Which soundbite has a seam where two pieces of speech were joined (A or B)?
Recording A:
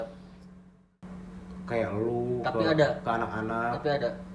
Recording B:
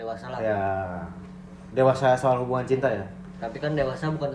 A